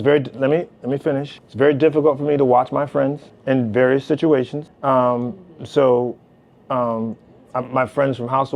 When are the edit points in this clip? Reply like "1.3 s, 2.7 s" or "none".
1.4 s, 3.3 s, 4.6 s